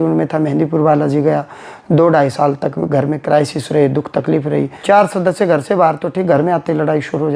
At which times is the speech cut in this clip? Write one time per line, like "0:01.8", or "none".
0:04.7